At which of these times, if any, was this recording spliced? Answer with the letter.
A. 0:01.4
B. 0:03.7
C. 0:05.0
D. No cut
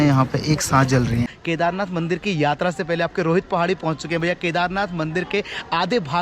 A